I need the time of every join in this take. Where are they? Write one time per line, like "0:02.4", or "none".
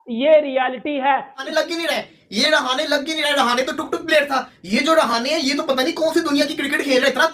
0:01.4